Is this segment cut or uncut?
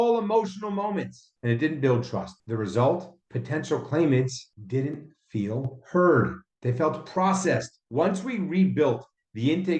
cut